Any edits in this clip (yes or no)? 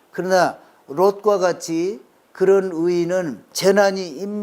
yes